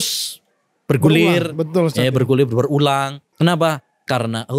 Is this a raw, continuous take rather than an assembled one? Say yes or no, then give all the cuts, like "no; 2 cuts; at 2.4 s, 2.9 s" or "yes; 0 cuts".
no; 1 cut; at 3.2 s